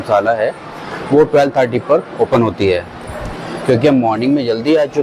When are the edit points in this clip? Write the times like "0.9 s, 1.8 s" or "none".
none